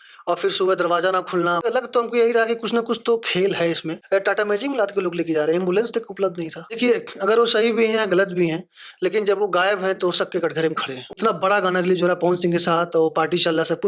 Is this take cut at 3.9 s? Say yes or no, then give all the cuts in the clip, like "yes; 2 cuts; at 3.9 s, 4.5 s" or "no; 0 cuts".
yes; 4 cuts; at 1.6 s, 3.9 s, 6.7 s, 11.2 s